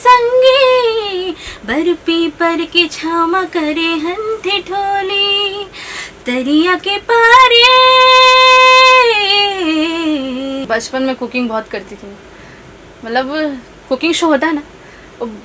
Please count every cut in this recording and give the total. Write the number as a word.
one